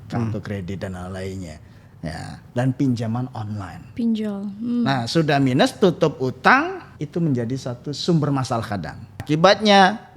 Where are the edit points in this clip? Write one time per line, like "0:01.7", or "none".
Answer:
0:06.9
0:09.1